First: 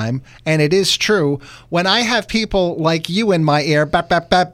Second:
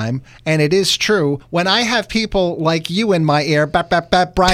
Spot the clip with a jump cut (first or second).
second